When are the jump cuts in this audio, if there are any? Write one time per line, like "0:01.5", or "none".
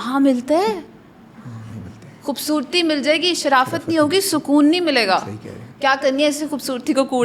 none